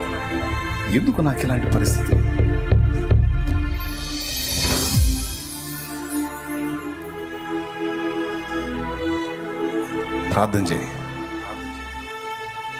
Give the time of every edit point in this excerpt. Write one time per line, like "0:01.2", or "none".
none